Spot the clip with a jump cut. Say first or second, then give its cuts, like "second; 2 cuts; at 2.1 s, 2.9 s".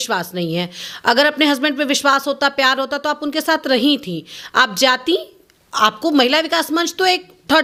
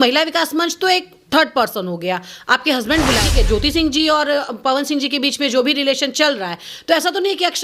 second; 1 cut; at 3.3 s